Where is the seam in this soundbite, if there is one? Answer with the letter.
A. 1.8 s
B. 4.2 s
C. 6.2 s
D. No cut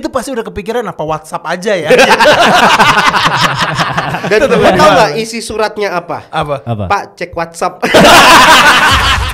B